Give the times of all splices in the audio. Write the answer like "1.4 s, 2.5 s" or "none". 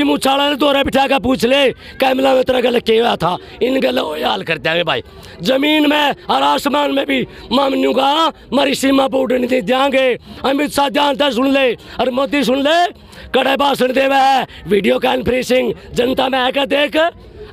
none